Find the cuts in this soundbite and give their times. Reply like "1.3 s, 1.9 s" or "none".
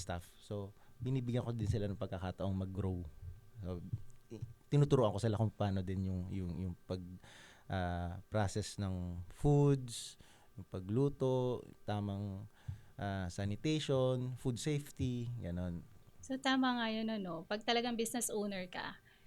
none